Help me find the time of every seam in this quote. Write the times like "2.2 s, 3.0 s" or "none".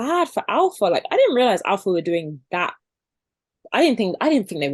none